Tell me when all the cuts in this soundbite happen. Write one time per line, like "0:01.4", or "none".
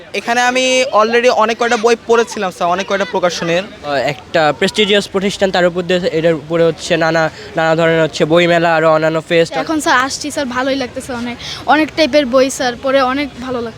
0:03.9
0:09.6